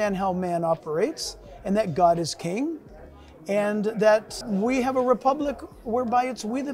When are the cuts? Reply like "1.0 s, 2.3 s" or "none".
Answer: 4.4 s